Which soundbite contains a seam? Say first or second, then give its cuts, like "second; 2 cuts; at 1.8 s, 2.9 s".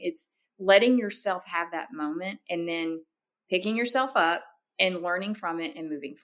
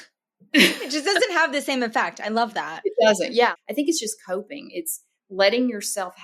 second; 1 cut; at 3.5 s